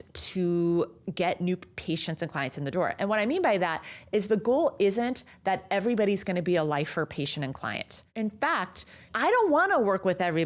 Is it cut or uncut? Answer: cut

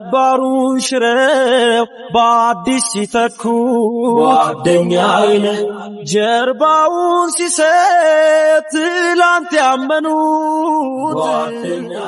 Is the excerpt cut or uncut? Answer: uncut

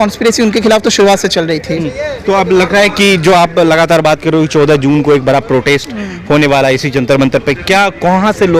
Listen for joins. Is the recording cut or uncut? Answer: uncut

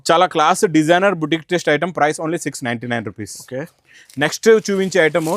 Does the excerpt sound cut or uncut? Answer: uncut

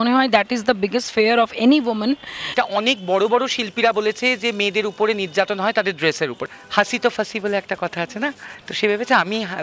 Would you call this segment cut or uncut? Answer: cut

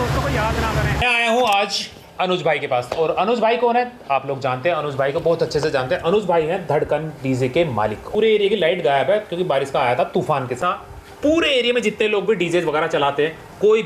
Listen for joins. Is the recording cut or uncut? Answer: cut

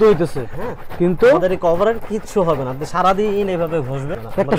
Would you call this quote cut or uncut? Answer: uncut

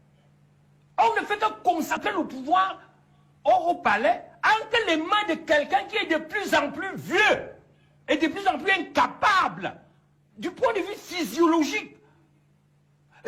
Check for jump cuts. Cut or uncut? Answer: cut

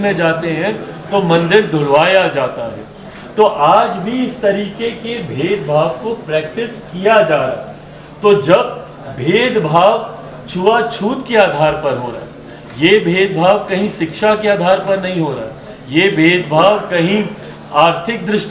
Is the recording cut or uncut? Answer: uncut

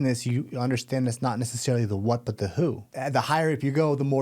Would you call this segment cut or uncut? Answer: cut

